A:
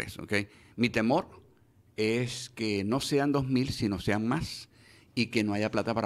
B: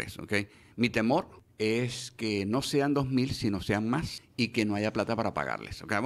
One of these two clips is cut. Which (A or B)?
B